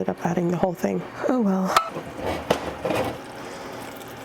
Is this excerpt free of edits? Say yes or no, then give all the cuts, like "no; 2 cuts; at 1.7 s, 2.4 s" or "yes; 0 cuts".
yes; 0 cuts